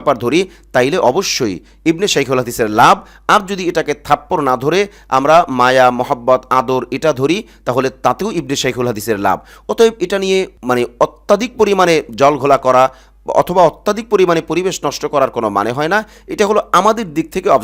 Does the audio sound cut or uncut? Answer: uncut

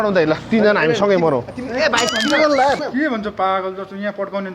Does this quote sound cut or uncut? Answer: cut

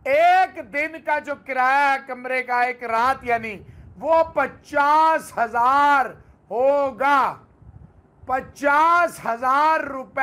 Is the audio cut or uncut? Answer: uncut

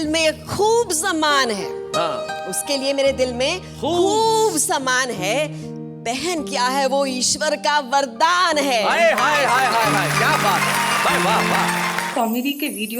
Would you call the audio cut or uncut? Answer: cut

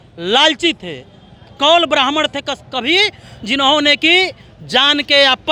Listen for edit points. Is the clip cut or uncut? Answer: uncut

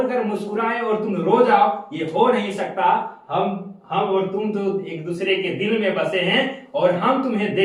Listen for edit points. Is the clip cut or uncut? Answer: uncut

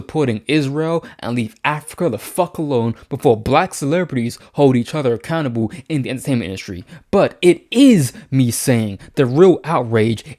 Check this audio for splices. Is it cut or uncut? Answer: uncut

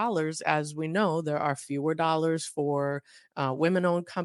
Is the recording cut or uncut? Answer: uncut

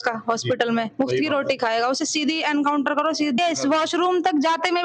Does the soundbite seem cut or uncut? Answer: cut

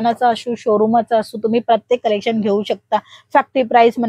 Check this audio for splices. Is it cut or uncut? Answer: uncut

